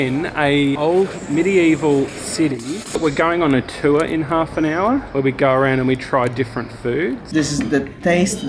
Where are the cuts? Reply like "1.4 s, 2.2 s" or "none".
1.2 s, 3.0 s, 7.2 s